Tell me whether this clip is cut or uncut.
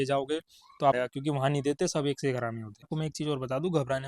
cut